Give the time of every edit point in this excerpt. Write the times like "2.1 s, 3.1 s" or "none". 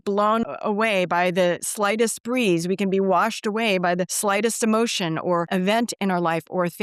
none